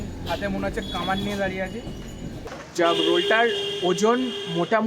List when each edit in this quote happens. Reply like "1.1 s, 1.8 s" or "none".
2.7 s